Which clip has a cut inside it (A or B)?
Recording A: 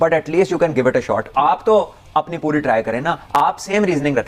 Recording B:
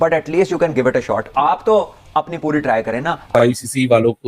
B